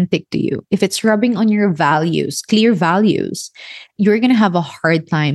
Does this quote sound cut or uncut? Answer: cut